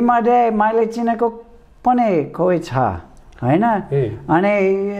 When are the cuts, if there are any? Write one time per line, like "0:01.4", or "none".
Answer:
none